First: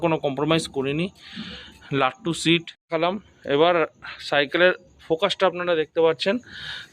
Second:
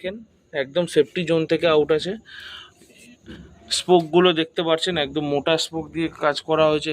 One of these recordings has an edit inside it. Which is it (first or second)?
first